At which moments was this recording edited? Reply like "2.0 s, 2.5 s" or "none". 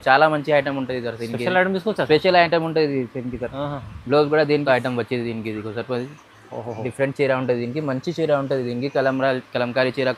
4.6 s